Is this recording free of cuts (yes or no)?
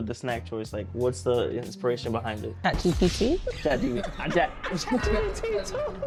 yes